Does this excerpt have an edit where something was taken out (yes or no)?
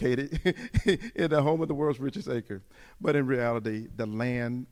no